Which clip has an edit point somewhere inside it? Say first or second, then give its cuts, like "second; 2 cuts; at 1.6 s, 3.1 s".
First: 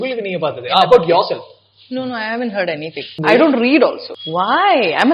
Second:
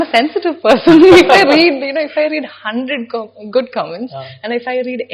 first; 2 cuts; at 3.2 s, 4.1 s